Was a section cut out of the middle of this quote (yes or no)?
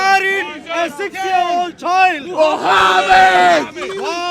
no